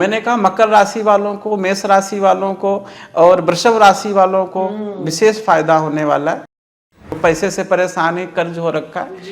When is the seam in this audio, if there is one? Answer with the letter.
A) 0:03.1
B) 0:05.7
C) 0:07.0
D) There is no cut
C